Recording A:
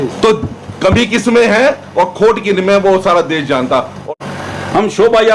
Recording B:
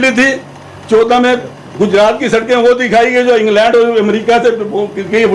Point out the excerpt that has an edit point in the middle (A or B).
A